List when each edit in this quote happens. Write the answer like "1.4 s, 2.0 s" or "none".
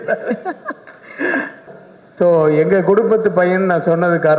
1.6 s